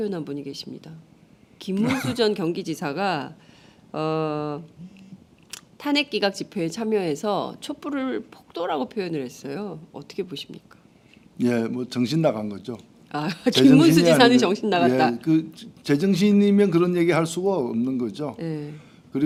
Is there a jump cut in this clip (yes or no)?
no